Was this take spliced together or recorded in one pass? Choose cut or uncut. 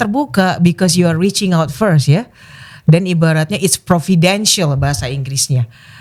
uncut